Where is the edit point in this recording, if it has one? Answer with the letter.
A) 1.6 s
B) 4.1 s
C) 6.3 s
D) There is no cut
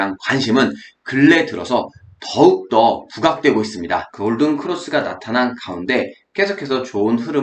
B